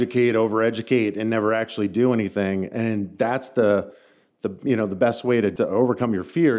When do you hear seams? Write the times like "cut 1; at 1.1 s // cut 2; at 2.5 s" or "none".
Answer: cut 1; at 5.5 s